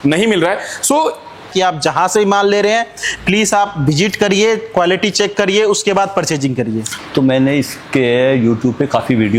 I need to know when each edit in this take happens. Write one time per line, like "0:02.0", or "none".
0:01.5
0:06.9